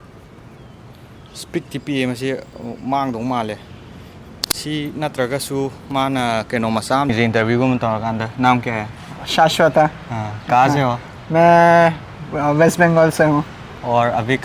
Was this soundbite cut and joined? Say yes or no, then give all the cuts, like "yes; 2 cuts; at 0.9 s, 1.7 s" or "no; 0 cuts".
yes; 1 cut; at 7.1 s